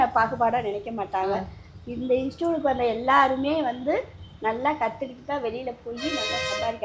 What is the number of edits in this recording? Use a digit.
0